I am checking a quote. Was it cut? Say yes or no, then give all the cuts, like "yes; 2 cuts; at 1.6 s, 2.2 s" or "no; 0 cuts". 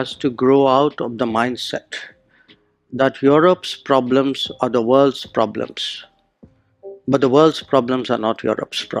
no; 0 cuts